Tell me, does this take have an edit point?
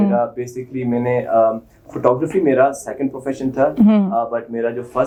no; 0 cuts

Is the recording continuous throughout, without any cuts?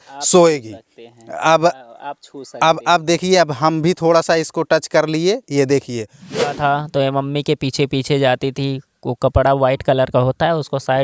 no; 1 cut; at 6.4 s

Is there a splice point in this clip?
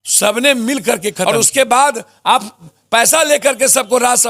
yes; 1 cut; at 1.2 s

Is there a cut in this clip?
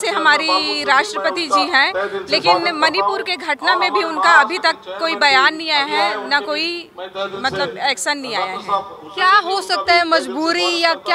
no; 0 cuts

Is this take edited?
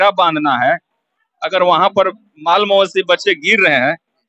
no; 0 cuts

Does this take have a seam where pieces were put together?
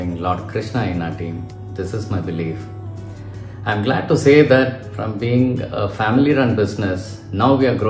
no; 0 cuts

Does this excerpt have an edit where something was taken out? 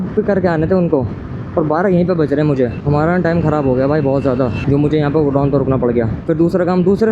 yes; 2 cuts; at 2.8 s, 6.2 s

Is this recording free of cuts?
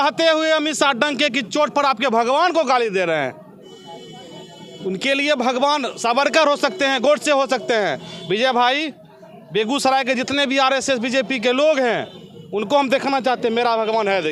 yes; 0 cuts

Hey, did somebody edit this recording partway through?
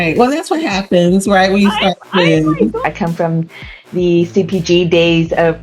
yes; 1 cut; at 2.8 s

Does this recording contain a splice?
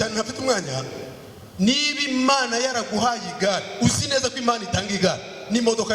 no; 0 cuts

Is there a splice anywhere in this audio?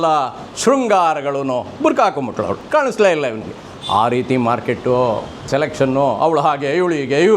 yes; 2 cuts; at 2.6 s, 5.3 s

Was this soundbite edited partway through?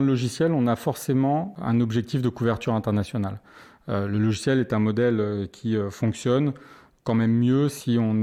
no; 0 cuts

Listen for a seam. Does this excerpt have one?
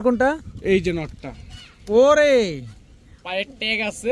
no; 0 cuts

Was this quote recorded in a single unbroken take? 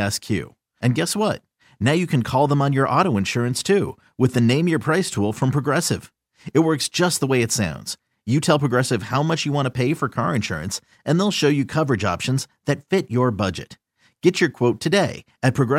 yes; 0 cuts

